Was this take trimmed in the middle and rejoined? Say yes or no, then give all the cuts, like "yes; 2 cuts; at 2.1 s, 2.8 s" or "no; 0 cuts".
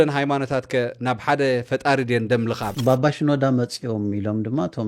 yes; 1 cut; at 2.7 s